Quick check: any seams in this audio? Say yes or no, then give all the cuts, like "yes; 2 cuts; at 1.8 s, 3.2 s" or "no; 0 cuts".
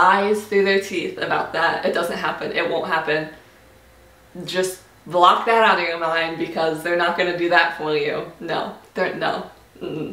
no; 0 cuts